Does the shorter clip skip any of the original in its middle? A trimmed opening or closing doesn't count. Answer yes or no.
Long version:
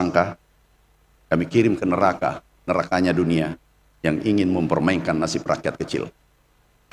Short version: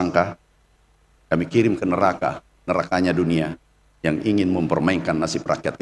no